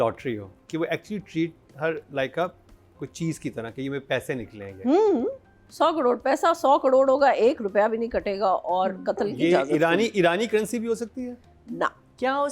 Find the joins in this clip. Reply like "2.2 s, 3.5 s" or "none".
5.6 s